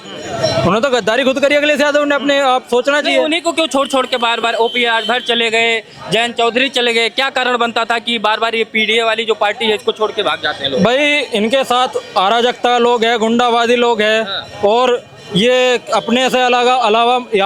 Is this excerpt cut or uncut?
uncut